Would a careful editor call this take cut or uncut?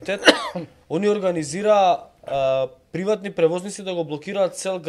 uncut